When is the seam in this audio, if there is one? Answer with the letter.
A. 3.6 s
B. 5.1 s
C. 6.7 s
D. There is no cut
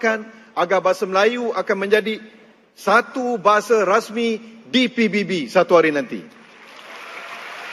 D